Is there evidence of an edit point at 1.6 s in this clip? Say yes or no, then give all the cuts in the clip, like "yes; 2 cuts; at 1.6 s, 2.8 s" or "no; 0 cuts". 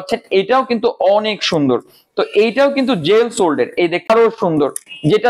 no; 1 cut; at 4.1 s